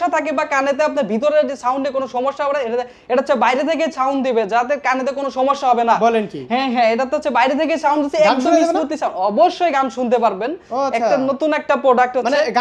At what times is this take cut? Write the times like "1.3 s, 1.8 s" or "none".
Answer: none